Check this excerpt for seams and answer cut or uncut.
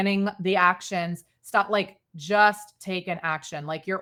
uncut